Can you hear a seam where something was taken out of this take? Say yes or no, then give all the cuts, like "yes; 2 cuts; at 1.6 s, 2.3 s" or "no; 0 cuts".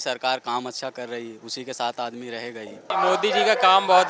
yes; 1 cut; at 2.9 s